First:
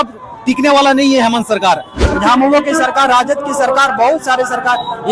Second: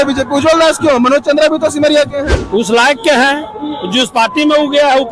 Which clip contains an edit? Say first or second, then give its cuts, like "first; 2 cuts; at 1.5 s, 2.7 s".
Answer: first; 1 cut; at 2.1 s